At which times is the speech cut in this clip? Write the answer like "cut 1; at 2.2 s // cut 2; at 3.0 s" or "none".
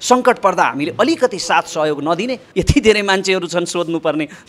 cut 1; at 2.4 s